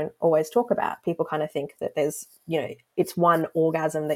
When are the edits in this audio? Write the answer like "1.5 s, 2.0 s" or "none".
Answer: none